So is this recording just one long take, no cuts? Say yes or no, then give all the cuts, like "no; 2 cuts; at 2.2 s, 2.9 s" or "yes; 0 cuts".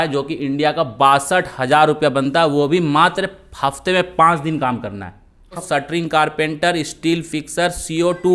no; 1 cut; at 5.6 s